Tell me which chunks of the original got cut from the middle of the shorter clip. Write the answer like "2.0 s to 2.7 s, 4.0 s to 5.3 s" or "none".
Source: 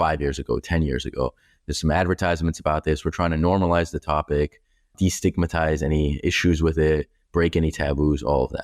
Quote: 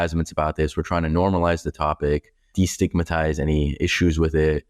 4.7 s to 4.8 s